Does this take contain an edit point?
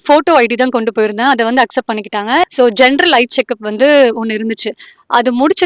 yes; 1 cut; at 2.5 s

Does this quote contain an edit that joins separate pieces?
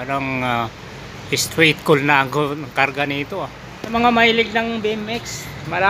yes; 1 cut; at 3.9 s

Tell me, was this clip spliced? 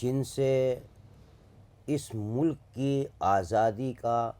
no; 0 cuts

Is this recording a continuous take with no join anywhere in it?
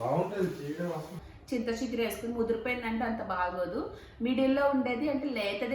no; 1 cut; at 1.3 s

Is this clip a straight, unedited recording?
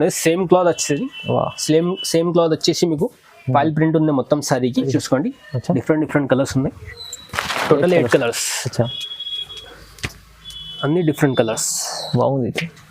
no; 1 cut; at 4.9 s

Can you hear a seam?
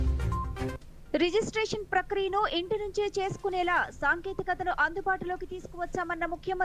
yes; 1 cut; at 0.9 s

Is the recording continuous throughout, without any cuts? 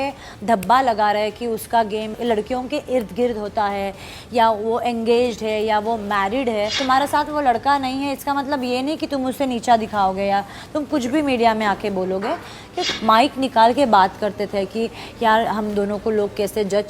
no; 3 cuts; at 2.2 s, 6.8 s, 12.8 s

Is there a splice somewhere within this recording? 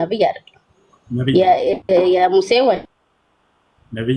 no; 0 cuts

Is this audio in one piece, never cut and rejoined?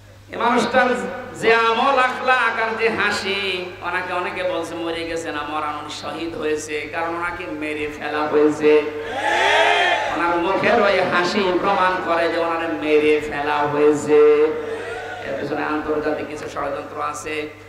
yes; 0 cuts

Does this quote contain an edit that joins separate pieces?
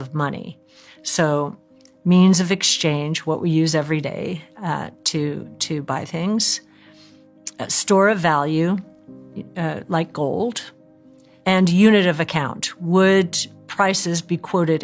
no; 0 cuts

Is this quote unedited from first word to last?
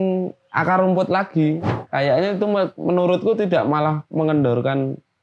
no; 1 cut; at 1.7 s

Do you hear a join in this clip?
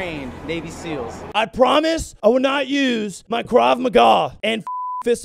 yes; 1 cut; at 1.2 s

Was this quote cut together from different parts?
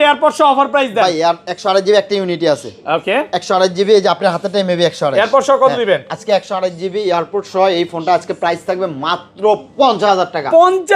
no; 0 cuts

